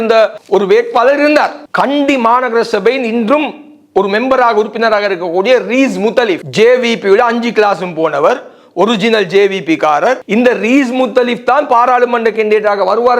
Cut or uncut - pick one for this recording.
uncut